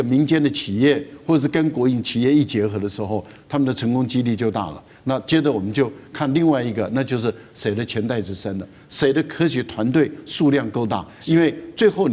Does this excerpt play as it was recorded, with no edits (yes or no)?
yes